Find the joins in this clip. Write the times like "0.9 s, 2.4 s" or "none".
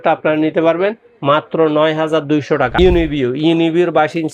2.7 s